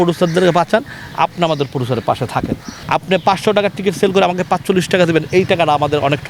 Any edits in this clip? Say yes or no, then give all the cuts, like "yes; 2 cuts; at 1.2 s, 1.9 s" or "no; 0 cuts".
yes; 1 cut; at 2.7 s